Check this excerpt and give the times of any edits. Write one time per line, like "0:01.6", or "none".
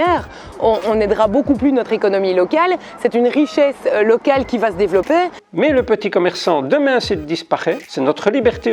0:05.3

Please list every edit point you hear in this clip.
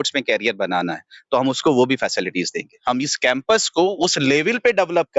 0:02.7

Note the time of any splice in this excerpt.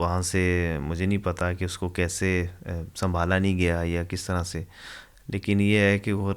none

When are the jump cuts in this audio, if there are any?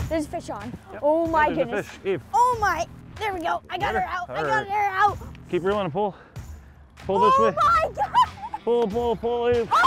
0:02.2
0:05.4

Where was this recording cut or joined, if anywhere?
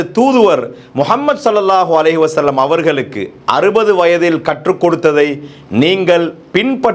none

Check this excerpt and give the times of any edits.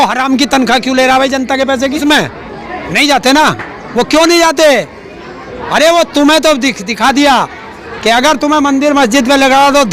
0:02.0

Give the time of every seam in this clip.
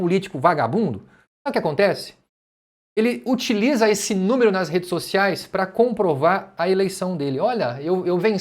none

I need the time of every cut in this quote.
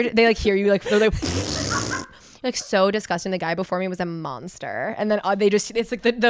none

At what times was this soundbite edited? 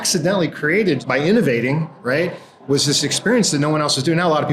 0:01.0

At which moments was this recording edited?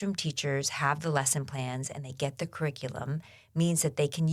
none

